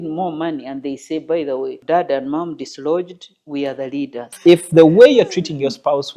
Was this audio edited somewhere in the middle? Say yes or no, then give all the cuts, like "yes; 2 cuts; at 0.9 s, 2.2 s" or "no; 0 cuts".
yes; 2 cuts; at 1.8 s, 4.3 s